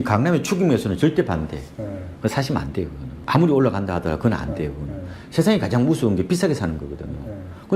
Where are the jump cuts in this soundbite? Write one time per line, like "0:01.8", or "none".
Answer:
0:03.1